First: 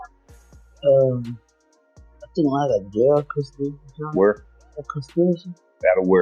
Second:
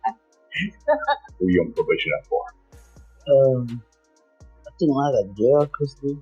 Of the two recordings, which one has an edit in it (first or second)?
second